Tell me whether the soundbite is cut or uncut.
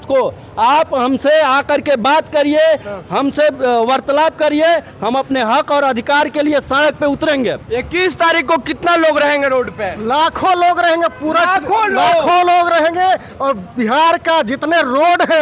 uncut